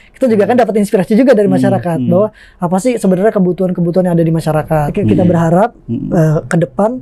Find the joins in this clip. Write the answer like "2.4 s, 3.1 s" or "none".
5.0 s